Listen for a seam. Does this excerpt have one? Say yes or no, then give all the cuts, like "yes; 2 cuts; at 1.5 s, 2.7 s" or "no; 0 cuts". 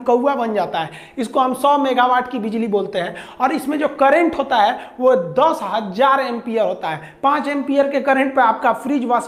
no; 0 cuts